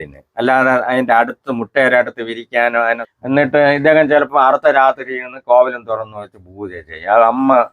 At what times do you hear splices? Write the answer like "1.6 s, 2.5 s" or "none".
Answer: 3.1 s